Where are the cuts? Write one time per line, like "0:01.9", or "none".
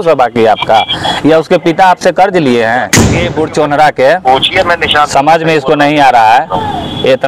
0:03.2